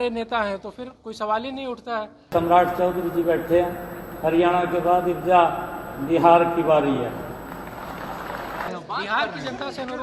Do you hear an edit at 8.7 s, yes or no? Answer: yes